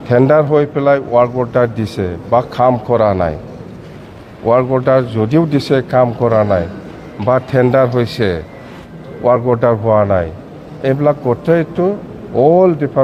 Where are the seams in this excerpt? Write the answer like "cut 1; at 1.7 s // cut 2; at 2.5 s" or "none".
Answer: none